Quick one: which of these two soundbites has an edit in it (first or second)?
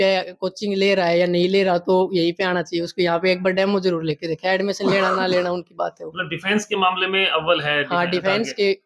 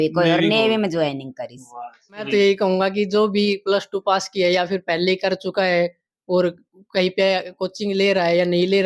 second